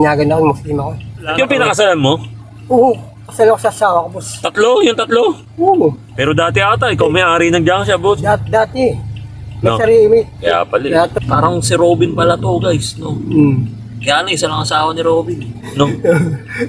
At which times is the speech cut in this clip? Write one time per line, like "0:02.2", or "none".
0:01.3
0:06.1
0:11.1